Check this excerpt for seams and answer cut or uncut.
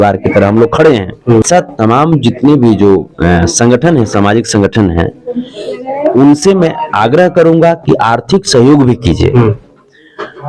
cut